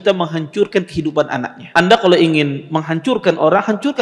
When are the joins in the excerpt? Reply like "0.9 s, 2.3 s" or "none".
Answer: 1.6 s